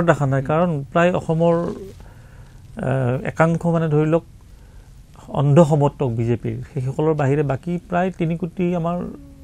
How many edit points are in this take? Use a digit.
0